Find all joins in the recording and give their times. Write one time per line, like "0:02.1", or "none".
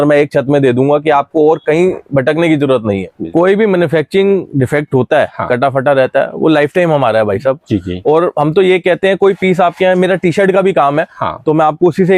0:03.2